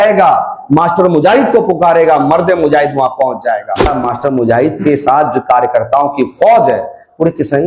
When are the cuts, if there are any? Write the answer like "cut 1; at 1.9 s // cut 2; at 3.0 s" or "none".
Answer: cut 1; at 3.9 s